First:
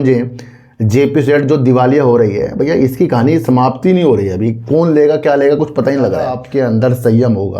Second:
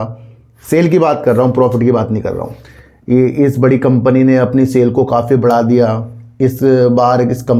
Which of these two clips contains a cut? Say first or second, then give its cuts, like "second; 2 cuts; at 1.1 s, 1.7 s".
first; 1 cut; at 6.4 s